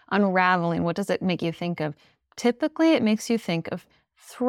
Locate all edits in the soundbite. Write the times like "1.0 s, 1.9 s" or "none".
none